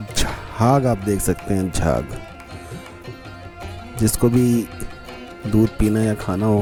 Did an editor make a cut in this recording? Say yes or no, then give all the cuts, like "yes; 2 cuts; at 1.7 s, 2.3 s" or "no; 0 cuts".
no; 0 cuts